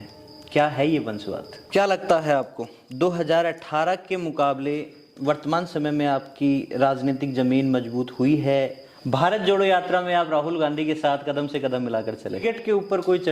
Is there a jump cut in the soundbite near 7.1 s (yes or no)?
no